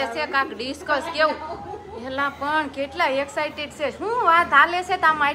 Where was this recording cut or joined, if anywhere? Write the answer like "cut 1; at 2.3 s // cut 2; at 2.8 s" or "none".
none